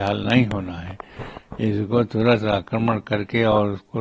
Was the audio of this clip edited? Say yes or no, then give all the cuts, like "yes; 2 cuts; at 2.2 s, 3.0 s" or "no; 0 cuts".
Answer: no; 0 cuts